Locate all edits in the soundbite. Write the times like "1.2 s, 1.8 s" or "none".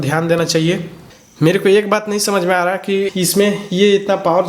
1.1 s, 3.1 s